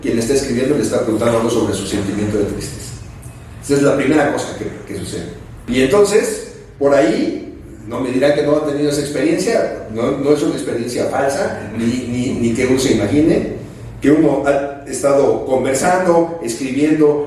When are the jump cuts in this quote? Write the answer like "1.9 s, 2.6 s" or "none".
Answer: 5.6 s